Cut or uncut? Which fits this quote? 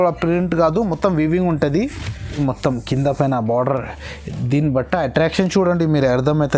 cut